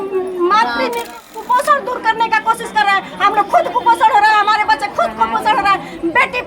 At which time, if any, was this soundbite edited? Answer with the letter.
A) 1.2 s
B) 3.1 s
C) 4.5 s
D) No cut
A